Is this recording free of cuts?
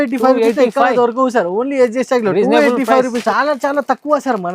no; 1 cut; at 3.2 s

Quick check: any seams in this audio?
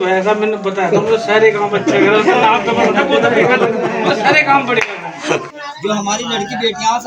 yes; 1 cut; at 5.6 s

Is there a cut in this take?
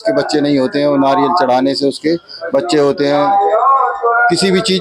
no; 0 cuts

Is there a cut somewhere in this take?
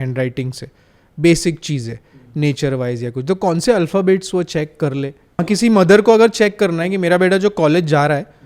yes; 1 cut; at 5.4 s

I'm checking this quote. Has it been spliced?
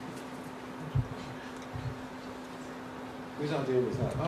yes; 1 cut; at 3.1 s

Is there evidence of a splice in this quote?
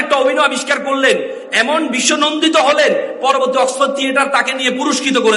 no; 0 cuts

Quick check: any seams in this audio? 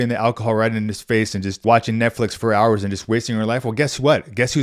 yes; 1 cut; at 1.6 s

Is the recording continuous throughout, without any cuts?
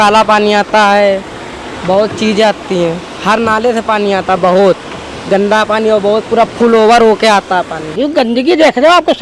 no; 1 cut; at 7.8 s

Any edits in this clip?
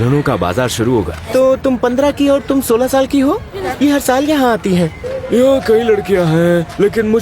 yes; 3 cuts; at 1.2 s, 3.6 s, 5.1 s

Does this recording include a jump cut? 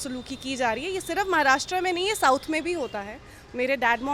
no; 0 cuts

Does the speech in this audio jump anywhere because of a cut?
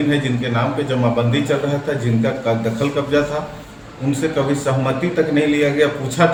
no; 0 cuts

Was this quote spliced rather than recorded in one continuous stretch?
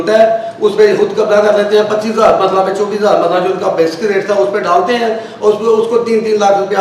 no; 0 cuts

